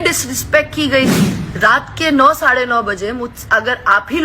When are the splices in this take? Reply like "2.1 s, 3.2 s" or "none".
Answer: 1.4 s